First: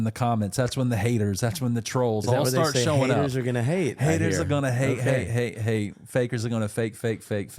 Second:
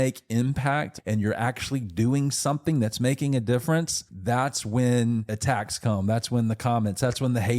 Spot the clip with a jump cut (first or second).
second